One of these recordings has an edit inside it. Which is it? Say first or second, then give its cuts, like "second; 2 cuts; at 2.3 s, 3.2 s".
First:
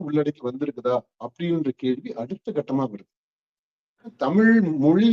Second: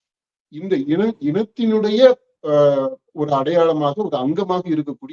first; 1 cut; at 4.2 s